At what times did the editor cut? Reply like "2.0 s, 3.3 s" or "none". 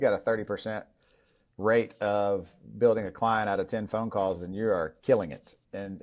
none